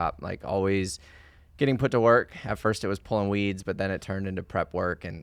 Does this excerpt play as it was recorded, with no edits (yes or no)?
yes